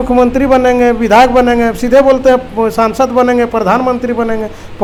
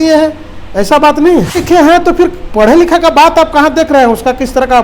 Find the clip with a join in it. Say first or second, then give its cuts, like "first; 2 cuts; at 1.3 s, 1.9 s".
second; 1 cut; at 1.6 s